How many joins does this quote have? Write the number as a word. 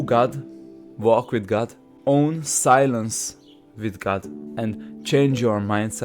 two